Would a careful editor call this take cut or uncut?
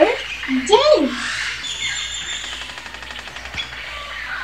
cut